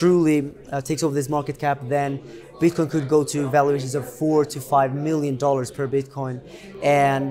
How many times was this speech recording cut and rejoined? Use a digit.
0